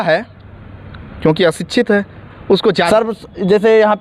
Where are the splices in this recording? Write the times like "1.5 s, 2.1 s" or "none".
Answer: 2.9 s